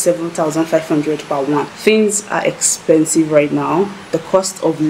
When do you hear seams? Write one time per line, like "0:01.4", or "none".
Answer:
0:01.6